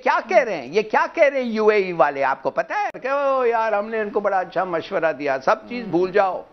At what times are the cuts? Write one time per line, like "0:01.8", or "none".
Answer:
0:02.9